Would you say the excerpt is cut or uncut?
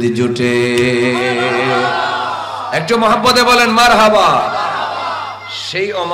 uncut